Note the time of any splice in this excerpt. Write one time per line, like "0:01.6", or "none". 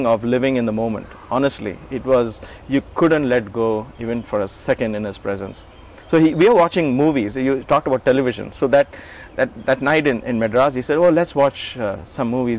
none